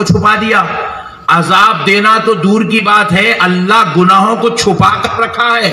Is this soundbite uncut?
yes; 0 cuts

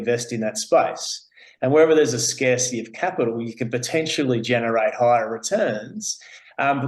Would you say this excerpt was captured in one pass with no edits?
yes; 0 cuts

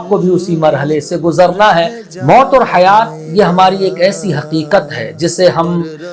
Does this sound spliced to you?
yes; 1 cut; at 2.0 s

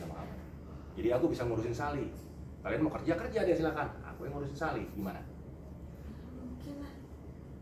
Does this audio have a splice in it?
no; 0 cuts

